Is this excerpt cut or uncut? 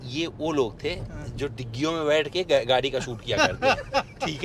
uncut